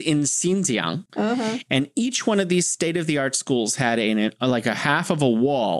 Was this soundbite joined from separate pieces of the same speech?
yes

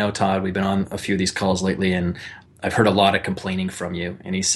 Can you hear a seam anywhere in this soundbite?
no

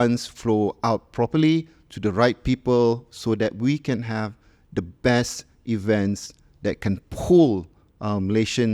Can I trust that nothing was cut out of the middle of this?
yes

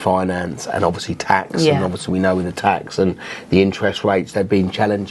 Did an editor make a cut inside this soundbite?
no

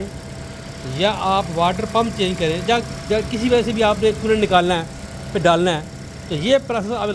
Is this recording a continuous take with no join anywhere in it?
yes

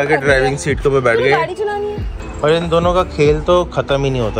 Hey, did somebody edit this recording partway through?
yes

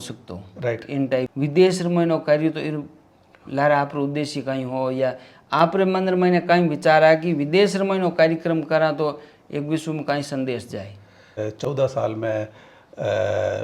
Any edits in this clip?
yes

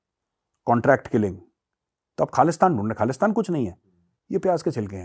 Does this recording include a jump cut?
no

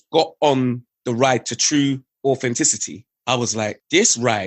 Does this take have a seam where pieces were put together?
yes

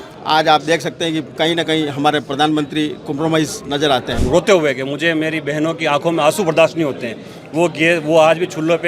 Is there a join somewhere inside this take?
yes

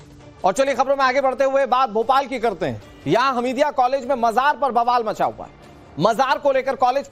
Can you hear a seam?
yes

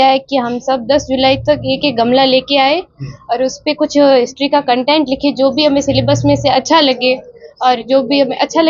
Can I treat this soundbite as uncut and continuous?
yes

